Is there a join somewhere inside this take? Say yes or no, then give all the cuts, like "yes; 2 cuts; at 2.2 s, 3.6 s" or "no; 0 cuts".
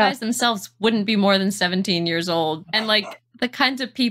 yes; 1 cut; at 2.6 s